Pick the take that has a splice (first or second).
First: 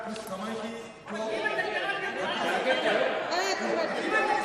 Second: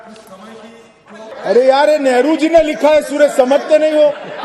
second